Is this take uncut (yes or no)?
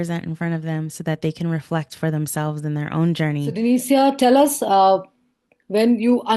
no